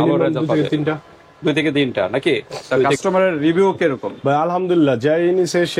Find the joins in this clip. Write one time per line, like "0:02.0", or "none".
0:02.9